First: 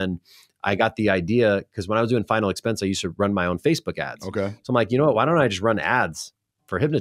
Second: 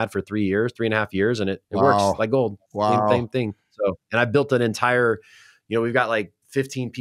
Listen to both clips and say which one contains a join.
second; 1 cut; at 1.6 s

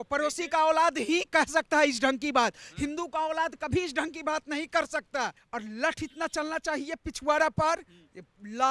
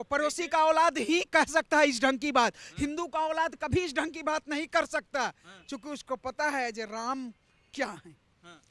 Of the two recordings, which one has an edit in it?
first; 1 cut; at 5.4 s

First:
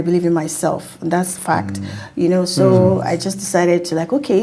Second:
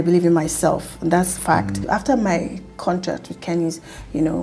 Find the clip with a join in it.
second; 1 cut; at 1.8 s

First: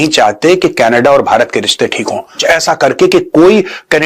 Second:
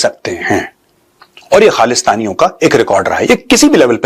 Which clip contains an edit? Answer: first; 1 cut; at 2.4 s

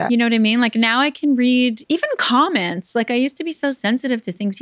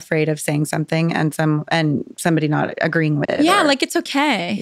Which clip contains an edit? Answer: second; 1 cut; at 3.3 s

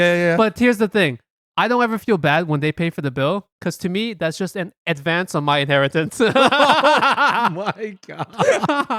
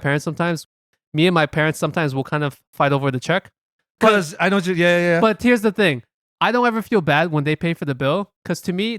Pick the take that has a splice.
second; 1 cut; at 3.8 s

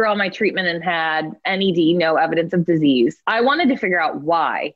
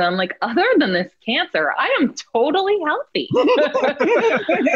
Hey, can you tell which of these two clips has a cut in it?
first; 2 cuts; at 1.4 s, 3.2 s

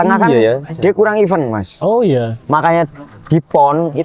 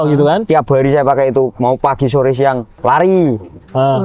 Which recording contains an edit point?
second; 1 cut; at 2.7 s

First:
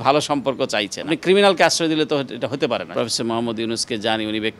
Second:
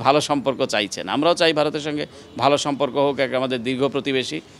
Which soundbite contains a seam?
first; 2 cuts; at 1.1 s, 2.9 s

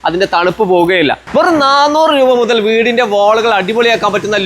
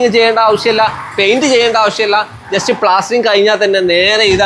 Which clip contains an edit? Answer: first; 1 cut; at 1.2 s

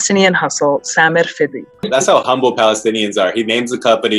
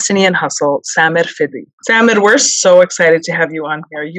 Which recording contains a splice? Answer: first; 1 cut; at 1.9 s

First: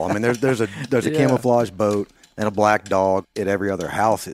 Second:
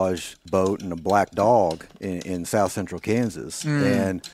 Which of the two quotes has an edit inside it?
first; 1 cut; at 3.2 s

